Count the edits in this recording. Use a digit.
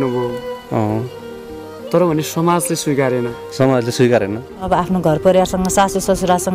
1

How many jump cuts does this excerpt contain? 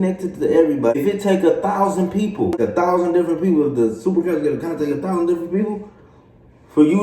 2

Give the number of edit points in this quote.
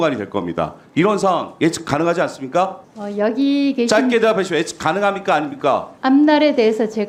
0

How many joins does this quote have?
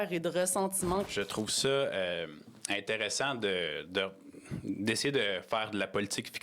1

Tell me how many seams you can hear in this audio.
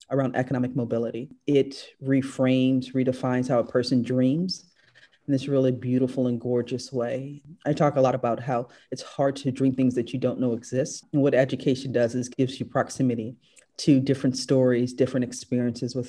3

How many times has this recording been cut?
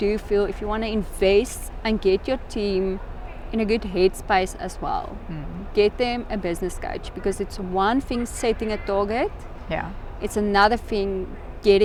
0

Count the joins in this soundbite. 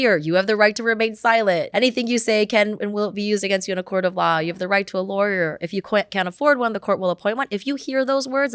1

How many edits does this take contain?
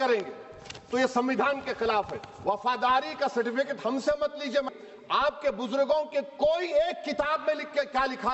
1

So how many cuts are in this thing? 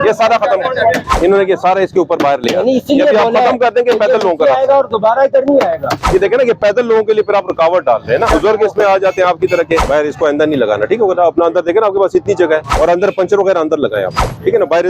5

